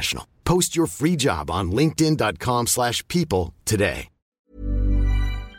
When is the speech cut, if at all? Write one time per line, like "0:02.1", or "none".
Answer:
0:04.4